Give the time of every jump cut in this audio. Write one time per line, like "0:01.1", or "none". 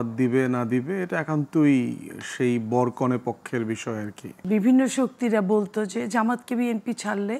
0:04.3